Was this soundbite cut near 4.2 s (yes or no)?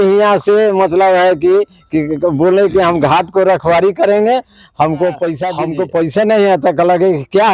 no